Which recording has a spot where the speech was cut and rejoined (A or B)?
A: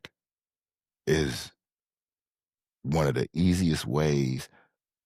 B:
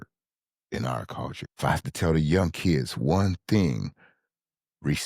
B